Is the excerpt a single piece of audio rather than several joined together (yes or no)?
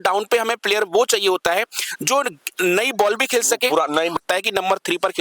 no